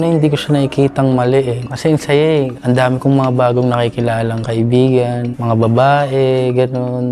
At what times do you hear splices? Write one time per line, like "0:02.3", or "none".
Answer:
0:01.6
0:02.5
0:05.3